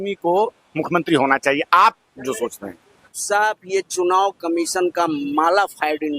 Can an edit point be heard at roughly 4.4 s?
no; 1 cut; at 3.2 s

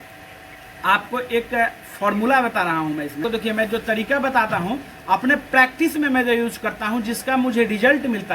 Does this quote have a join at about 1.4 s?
no; 1 cut; at 3.2 s

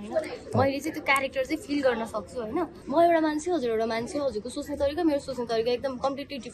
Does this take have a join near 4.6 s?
no; 1 cut; at 2.8 s

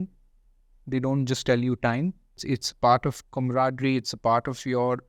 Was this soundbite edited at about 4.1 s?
no; 1 cut; at 2.4 s

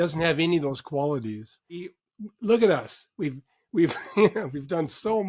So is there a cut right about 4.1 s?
no; 1 cut; at 2.0 s

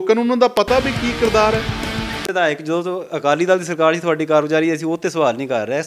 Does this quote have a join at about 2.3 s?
yes; 1 cut; at 2.3 s

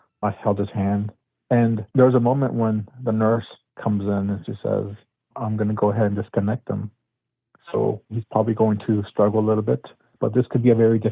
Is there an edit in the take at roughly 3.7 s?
no; 2 cuts; at 5.3 s, 8.1 s

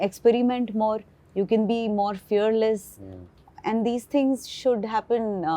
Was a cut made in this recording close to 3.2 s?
no; 0 cuts

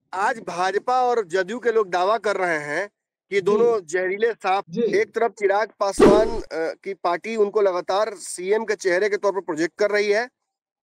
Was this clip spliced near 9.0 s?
no; 1 cut; at 4.7 s

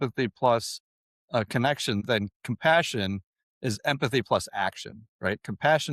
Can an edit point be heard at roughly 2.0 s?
yes; 1 cut; at 2.0 s

